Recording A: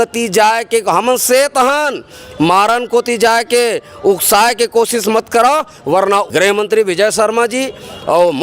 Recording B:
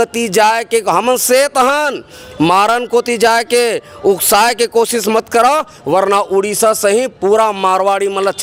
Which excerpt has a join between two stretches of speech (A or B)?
A